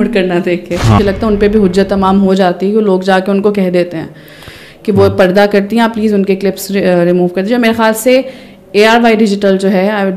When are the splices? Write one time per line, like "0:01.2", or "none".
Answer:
0:01.0